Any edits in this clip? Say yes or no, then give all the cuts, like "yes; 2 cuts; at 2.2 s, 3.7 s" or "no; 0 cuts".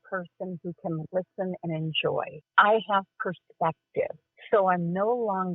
no; 0 cuts